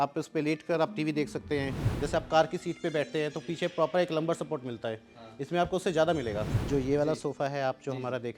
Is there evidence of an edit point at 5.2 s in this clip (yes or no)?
no